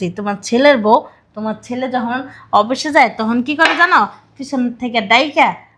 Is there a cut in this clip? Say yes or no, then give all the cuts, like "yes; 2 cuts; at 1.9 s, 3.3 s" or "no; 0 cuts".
no; 0 cuts